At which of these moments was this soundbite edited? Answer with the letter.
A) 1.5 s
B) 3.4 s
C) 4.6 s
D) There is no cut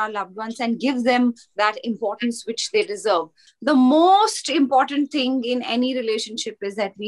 B